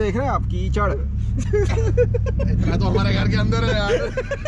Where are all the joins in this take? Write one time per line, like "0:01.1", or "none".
none